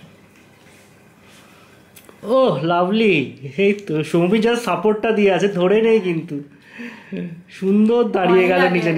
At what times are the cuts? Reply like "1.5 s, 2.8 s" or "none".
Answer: none